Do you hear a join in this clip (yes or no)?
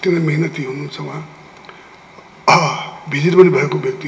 no